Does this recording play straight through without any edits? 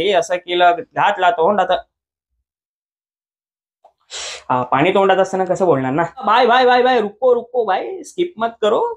no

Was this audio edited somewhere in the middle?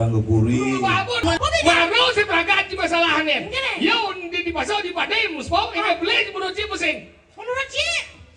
yes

